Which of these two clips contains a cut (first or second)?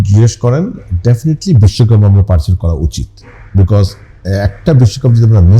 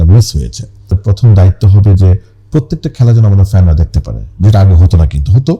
second